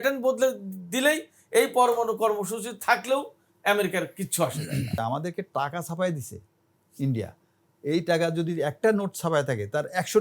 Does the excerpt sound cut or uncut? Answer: cut